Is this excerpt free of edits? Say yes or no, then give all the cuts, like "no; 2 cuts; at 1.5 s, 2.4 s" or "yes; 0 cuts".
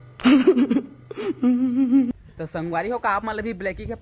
no; 1 cut; at 2.1 s